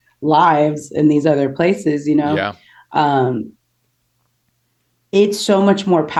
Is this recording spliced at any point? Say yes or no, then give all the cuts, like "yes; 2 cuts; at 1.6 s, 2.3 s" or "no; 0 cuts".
no; 0 cuts